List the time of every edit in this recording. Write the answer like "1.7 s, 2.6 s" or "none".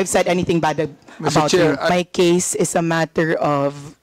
1.9 s